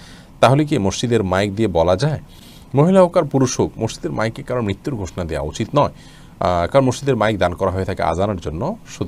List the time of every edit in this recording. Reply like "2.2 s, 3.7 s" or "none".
none